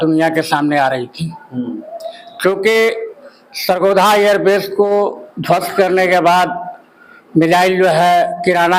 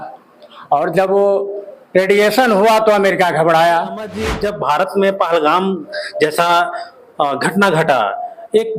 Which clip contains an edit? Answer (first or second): second